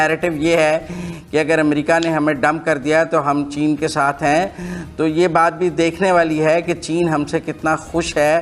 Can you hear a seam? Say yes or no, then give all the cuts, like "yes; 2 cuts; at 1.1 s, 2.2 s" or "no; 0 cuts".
no; 0 cuts